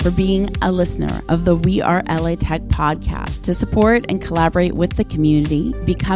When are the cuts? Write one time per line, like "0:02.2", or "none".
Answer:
none